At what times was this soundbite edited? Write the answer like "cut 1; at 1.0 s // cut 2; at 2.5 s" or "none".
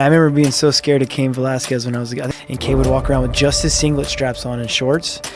cut 1; at 2.3 s